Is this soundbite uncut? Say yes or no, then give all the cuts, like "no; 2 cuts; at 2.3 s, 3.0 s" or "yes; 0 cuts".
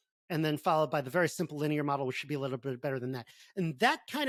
yes; 0 cuts